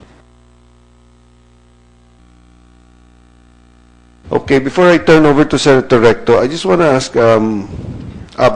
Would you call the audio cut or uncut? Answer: uncut